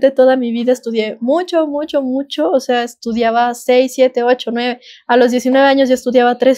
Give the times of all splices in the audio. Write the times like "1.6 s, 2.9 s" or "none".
none